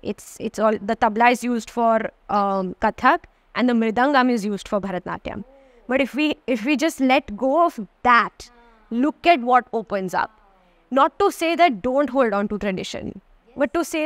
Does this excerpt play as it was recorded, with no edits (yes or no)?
yes